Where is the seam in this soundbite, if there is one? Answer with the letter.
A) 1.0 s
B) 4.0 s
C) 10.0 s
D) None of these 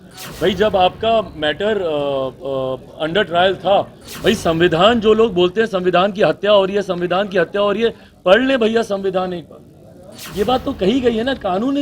B